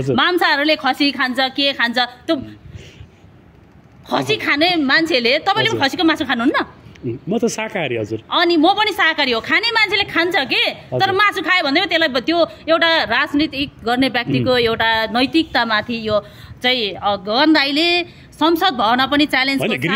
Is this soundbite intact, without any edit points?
yes; 0 cuts

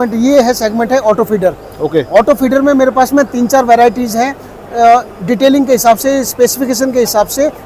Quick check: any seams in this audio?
no; 0 cuts

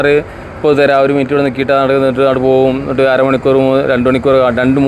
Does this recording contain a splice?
no; 0 cuts

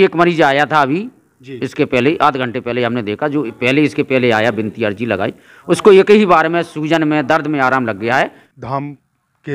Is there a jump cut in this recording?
yes; 1 cut; at 8.5 s

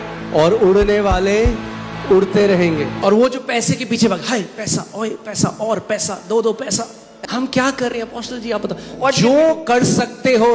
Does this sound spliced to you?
yes; 2 cuts; at 2.9 s, 7.0 s

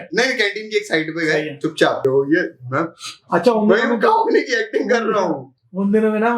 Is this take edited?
yes; 1 cut; at 2.0 s

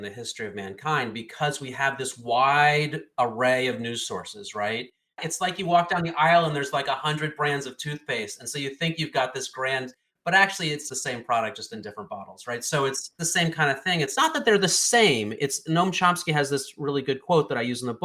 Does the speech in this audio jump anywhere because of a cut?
yes; 1 cut; at 5.2 s

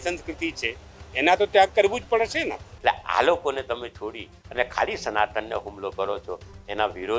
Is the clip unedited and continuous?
no; 1 cut; at 2.7 s

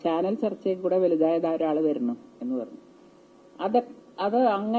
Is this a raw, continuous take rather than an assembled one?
yes; 0 cuts

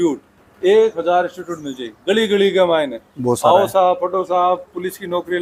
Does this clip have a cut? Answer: no; 0 cuts

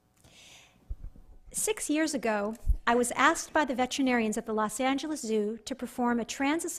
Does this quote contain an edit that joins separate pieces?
yes; 1 cut; at 1.6 s

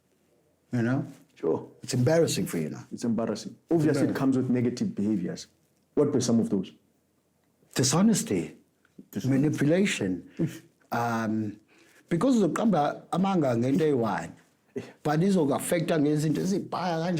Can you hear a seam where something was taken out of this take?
no; 0 cuts

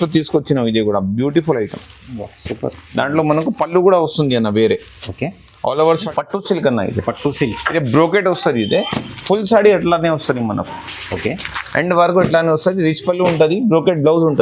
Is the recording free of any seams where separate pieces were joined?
no; 1 cut; at 6.1 s

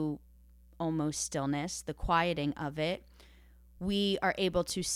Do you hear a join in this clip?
no; 0 cuts

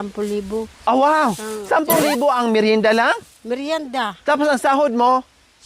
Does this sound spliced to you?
no; 0 cuts

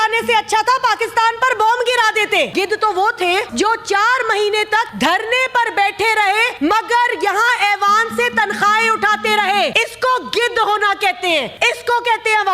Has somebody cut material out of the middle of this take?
yes; 6 cuts; at 2.5 s, 3.5 s, 4.9 s, 6.5 s, 9.7 s, 11.5 s

